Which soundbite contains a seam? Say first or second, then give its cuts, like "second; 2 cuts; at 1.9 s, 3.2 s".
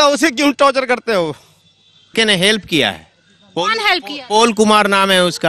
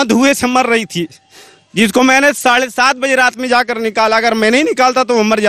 first; 1 cut; at 2.1 s